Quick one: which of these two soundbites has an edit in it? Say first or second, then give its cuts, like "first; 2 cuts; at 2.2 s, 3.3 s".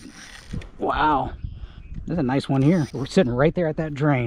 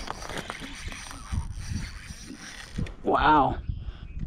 first; 1 cut; at 3.0 s